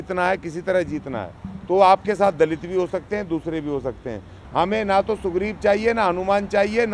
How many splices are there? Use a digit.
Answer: 1